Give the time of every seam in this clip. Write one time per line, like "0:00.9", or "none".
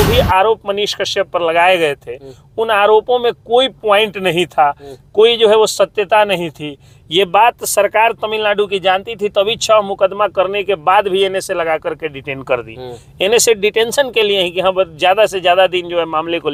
none

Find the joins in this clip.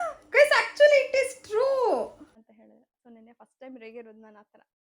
0:02.4

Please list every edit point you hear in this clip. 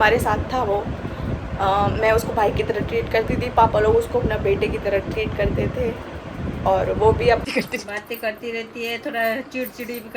0:07.4

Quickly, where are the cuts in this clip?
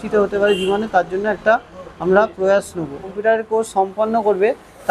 0:03.1

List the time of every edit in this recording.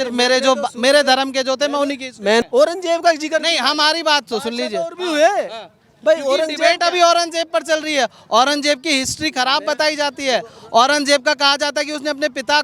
0:02.4

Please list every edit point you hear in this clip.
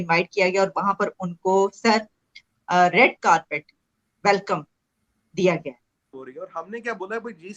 0:06.1

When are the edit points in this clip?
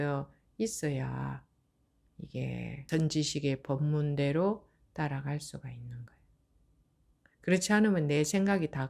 0:02.8

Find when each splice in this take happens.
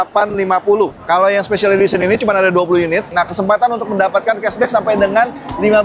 0:00.9
0:03.1

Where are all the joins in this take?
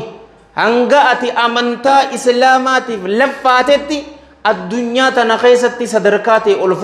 none

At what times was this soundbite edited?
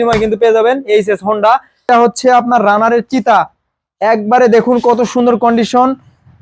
0:01.8

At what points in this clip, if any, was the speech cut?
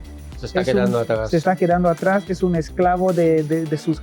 none

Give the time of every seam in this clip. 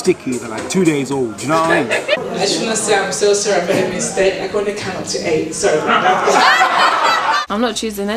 0:02.2
0:07.4

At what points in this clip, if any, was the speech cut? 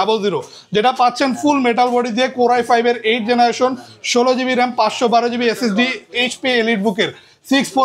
0:06.2

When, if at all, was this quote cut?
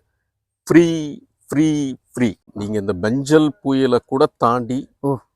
0:02.4

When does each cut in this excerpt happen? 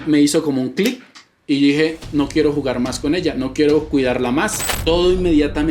0:04.6

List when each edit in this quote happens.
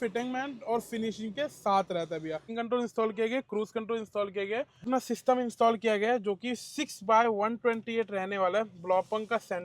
0:02.6
0:04.9

